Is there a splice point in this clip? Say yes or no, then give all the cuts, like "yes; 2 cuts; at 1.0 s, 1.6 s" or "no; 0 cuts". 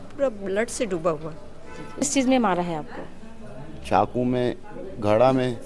yes; 1 cut; at 2.0 s